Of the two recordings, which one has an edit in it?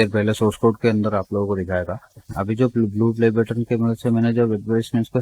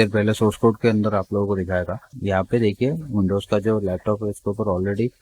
second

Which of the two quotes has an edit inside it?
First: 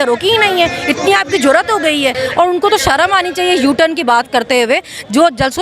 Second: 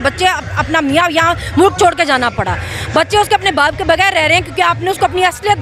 first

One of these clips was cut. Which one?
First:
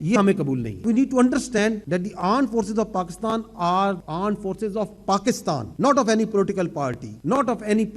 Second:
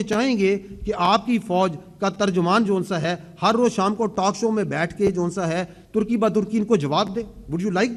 first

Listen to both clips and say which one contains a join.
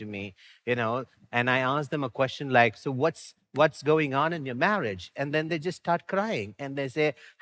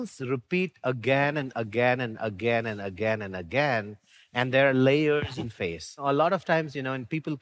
second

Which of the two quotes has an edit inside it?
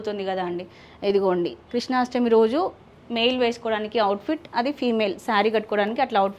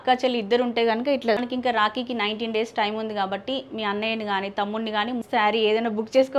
second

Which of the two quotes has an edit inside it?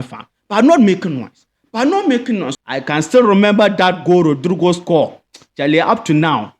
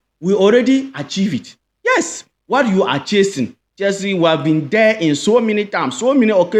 first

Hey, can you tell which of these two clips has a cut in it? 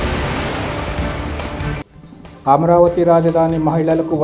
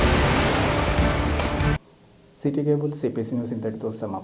first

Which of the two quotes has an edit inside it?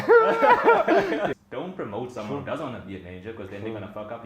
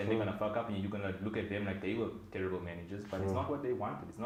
first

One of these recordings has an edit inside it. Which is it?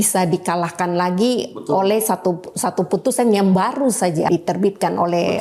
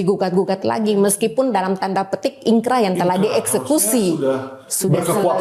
first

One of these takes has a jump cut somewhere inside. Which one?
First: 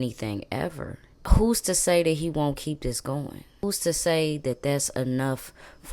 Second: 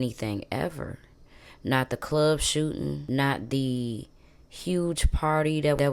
first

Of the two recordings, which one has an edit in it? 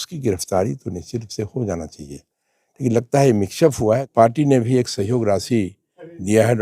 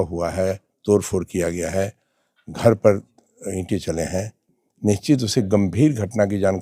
first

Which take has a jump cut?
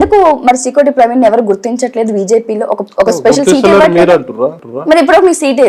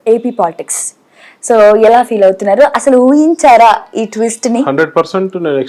first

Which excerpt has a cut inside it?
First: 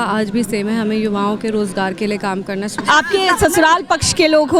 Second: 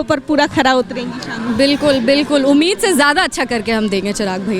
first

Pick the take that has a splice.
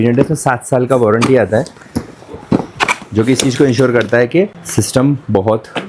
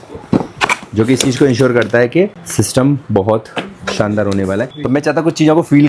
second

